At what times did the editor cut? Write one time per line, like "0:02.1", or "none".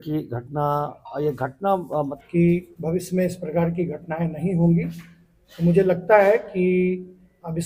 0:02.2